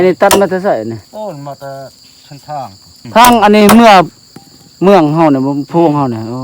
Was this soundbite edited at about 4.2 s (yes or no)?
no